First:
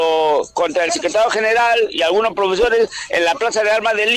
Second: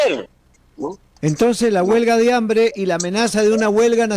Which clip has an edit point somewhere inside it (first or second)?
second